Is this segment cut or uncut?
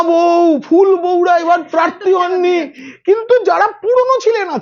uncut